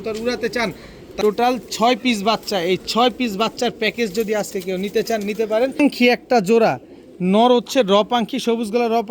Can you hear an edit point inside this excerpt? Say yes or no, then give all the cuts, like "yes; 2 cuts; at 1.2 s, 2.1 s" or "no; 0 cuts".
yes; 2 cuts; at 1.0 s, 5.8 s